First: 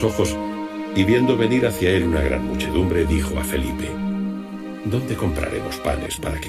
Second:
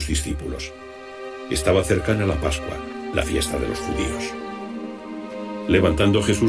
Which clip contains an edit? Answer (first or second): second